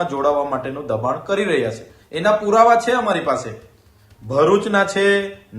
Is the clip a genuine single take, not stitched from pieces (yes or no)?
yes